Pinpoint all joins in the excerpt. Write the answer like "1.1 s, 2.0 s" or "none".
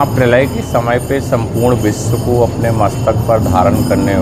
none